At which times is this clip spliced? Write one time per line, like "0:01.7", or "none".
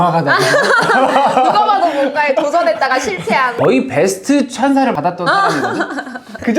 0:03.5